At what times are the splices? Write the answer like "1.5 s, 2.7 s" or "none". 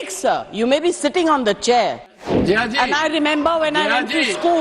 2.1 s